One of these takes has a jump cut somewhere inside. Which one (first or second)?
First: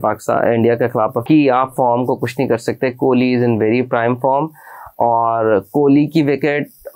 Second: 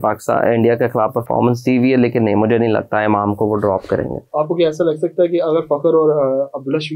first